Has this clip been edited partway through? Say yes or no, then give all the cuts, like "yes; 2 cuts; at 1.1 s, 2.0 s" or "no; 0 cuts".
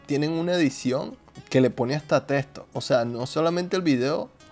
no; 0 cuts